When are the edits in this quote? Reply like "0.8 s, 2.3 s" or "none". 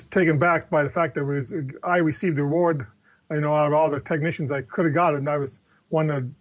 none